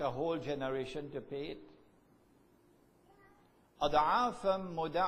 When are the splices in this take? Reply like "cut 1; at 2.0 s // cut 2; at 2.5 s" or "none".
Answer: none